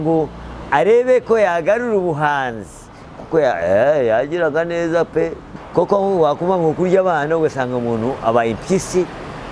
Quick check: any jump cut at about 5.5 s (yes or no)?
yes